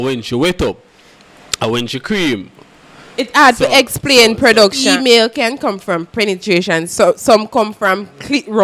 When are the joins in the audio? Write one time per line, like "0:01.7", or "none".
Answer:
0:04.8